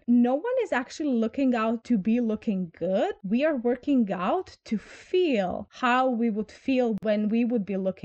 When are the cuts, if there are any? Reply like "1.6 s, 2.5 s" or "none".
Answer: 7.0 s